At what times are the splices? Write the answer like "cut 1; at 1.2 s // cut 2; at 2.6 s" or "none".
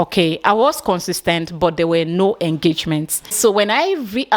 cut 1; at 3.3 s